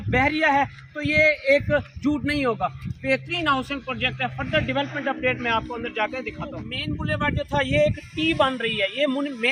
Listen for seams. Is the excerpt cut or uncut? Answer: uncut